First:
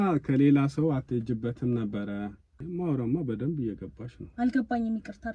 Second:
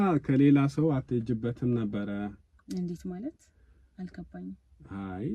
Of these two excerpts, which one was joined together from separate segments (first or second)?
first